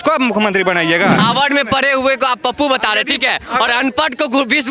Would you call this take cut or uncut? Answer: cut